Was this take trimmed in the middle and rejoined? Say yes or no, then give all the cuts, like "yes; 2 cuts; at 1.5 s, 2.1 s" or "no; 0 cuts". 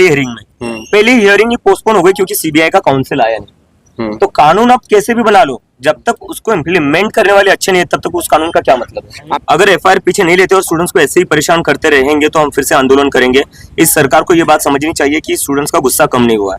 yes; 1 cut; at 9.3 s